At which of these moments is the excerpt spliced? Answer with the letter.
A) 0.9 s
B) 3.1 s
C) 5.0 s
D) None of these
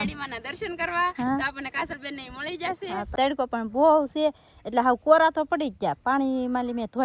B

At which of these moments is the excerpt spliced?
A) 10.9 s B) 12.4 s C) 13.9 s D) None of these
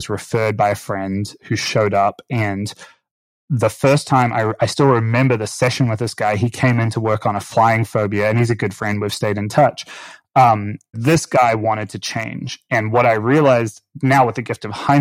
A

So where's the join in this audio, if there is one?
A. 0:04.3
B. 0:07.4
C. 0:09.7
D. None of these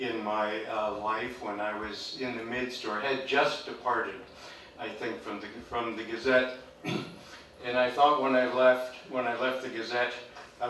C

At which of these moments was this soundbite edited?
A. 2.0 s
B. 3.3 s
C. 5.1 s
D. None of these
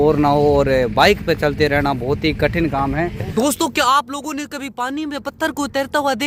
B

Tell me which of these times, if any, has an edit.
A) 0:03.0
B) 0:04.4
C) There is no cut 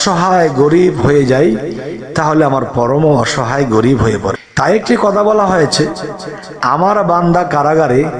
B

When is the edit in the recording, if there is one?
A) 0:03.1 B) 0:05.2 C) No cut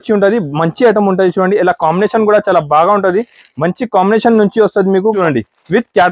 B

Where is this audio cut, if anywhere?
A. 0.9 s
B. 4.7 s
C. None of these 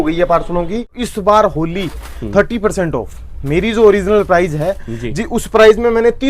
A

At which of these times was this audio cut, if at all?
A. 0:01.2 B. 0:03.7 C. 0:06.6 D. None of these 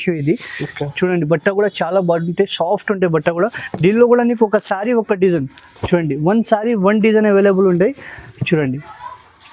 D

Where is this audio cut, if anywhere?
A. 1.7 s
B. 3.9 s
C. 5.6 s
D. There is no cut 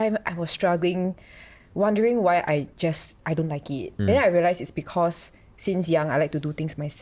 B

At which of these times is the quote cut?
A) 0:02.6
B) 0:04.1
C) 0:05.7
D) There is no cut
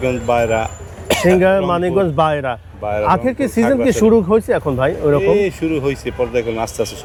D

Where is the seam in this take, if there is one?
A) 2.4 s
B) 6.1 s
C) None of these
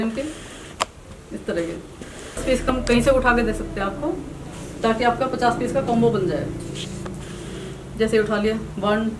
A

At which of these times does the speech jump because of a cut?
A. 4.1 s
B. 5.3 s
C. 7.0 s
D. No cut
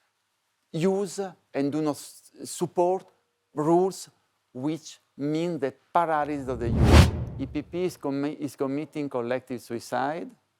C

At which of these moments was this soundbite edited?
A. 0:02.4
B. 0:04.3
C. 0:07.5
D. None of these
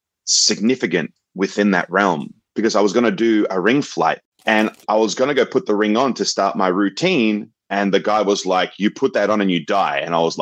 B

